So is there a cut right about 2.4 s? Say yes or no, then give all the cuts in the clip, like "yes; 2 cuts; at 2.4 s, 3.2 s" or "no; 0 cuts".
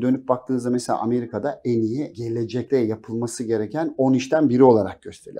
yes; 1 cut; at 2.4 s